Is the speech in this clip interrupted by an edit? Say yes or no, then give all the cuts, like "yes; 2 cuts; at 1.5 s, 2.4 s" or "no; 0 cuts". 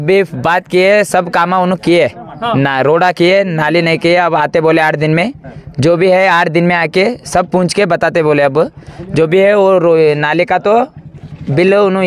no; 0 cuts